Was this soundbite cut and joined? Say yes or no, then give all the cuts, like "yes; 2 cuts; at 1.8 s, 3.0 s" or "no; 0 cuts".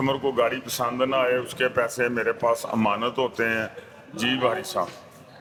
no; 0 cuts